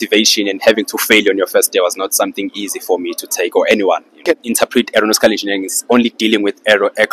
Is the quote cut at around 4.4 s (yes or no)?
yes